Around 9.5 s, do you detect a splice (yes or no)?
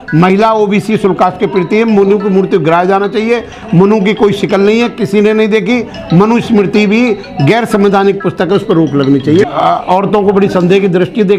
yes